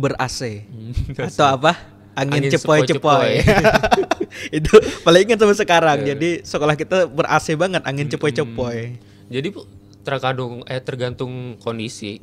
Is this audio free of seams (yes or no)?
yes